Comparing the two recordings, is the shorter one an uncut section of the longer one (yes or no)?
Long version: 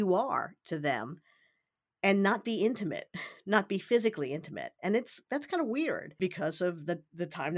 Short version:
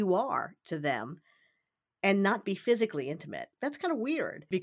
no